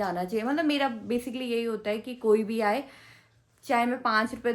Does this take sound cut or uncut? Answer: uncut